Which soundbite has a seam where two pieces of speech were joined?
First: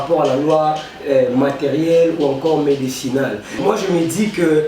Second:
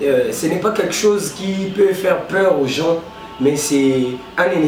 first; 1 cut; at 3.6 s

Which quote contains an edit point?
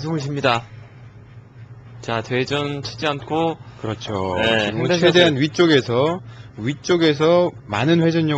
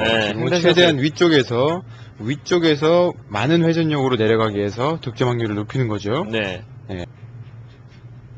second; 1 cut; at 7.0 s

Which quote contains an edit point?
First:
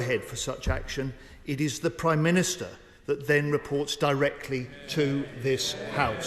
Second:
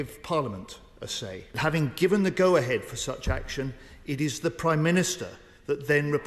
second; 1 cut; at 1.6 s

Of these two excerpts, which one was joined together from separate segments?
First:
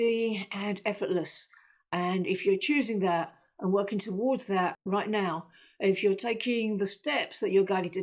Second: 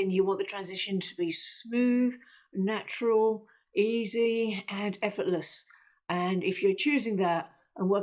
first; 1 cut; at 4.8 s

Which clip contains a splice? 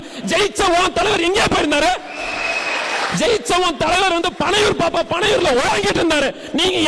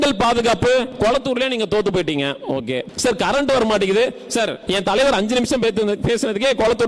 second; 3 cuts; at 0.9 s, 2.9 s, 4.6 s

